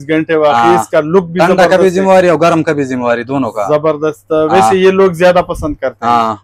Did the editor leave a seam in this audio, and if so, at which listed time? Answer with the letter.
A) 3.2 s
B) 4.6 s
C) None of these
C